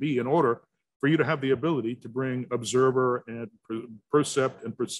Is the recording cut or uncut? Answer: uncut